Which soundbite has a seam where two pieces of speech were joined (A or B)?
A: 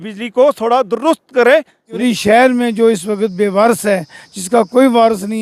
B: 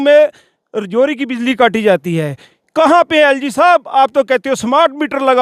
A